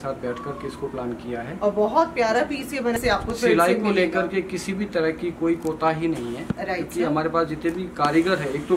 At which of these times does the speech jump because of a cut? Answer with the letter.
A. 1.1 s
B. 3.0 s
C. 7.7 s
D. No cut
B